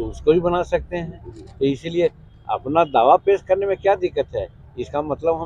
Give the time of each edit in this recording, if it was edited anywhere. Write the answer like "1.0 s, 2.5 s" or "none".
none

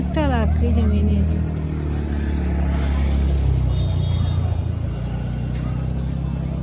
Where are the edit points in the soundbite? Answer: none

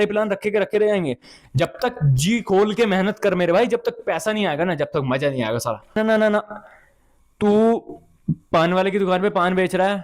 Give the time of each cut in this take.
6.0 s

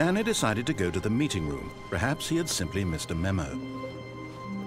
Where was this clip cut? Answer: 3.5 s

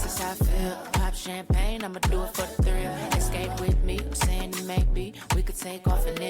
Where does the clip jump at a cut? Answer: none

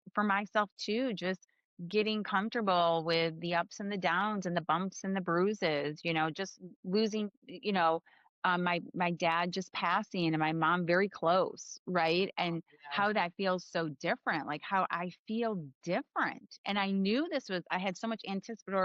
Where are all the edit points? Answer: none

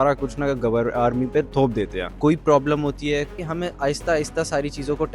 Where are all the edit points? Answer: 1.8 s, 3.4 s

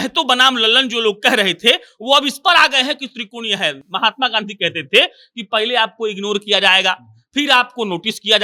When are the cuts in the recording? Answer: none

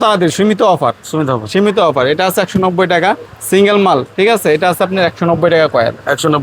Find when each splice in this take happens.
none

